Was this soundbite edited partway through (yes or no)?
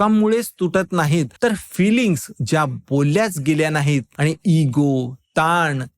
yes